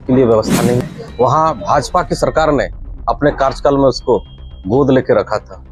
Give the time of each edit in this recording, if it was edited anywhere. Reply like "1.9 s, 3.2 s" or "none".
1.0 s